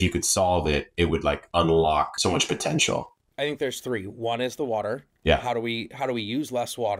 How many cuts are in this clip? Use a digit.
1